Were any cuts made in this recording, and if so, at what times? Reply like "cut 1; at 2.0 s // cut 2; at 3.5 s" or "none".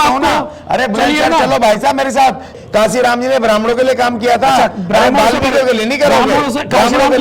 cut 1; at 2.6 s

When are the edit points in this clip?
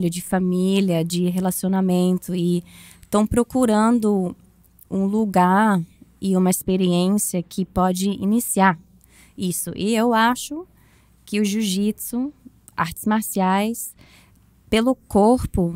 none

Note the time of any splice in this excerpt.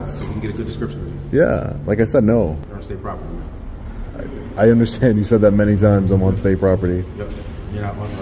cut 1; at 2.6 s

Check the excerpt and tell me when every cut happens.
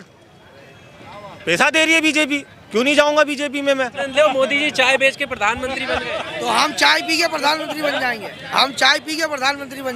cut 1; at 4.0 s

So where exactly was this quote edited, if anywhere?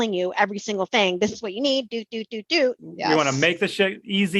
cut 1; at 2.9 s

